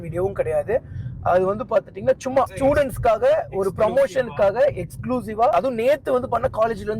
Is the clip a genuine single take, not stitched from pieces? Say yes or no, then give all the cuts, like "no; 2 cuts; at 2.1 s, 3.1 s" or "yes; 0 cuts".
no; 2 cuts; at 2.5 s, 5.5 s